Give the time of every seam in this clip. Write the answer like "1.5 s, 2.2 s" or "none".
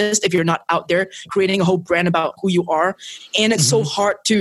1.3 s, 2.4 s

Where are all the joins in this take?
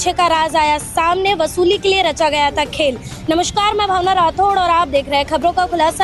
none

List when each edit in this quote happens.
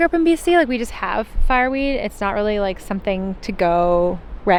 none

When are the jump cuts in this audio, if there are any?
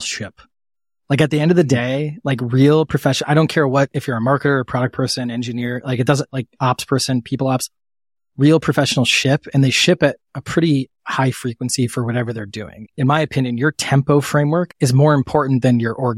12.8 s, 14.7 s

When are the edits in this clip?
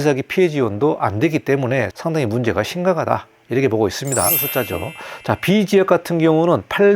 4.5 s

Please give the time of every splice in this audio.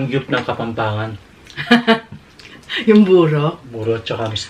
none

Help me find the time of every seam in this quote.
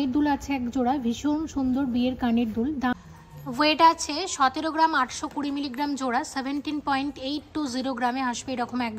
2.9 s

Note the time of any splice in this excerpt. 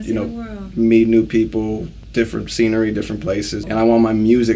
1.9 s, 3.6 s

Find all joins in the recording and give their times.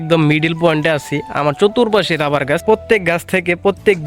2.6 s

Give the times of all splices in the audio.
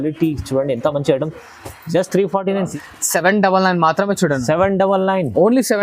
2.7 s

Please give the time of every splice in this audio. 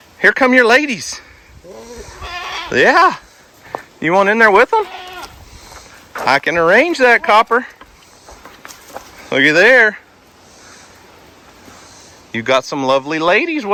none

